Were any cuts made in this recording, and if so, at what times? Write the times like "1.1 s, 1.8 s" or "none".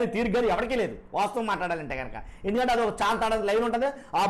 none